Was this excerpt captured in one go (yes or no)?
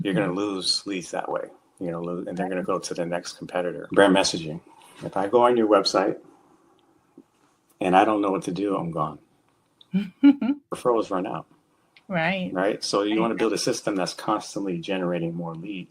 no